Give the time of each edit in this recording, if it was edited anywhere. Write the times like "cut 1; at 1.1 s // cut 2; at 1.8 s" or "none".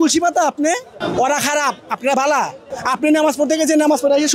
cut 1; at 1.0 s // cut 2; at 2.7 s